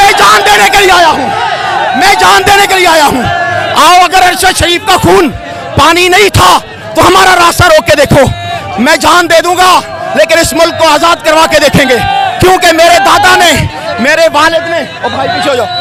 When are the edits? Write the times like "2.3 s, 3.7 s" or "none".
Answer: none